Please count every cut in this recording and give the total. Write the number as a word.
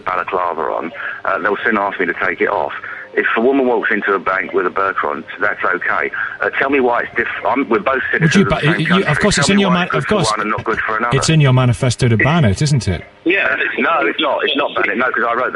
one